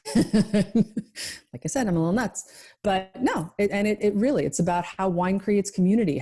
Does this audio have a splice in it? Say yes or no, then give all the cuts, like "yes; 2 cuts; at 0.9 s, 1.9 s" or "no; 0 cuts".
no; 0 cuts